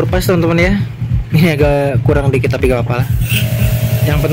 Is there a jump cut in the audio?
no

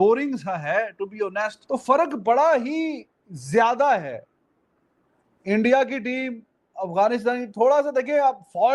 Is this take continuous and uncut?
no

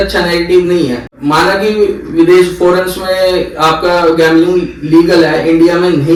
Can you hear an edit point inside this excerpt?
no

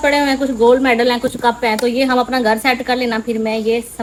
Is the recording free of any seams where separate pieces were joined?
yes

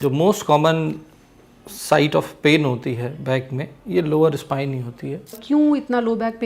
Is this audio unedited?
no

